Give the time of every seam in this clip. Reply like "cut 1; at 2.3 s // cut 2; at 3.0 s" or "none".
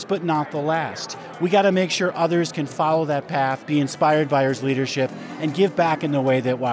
cut 1; at 3.3 s